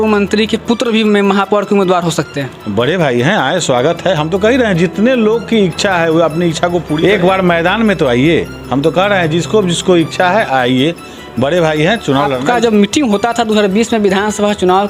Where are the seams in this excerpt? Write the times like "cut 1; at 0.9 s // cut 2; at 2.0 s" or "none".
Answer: cut 1; at 6.9 s // cut 2; at 12.4 s